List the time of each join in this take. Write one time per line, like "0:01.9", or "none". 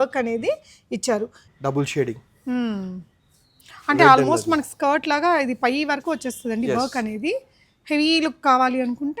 0:01.4